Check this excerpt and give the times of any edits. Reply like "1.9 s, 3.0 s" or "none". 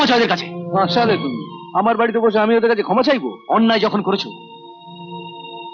none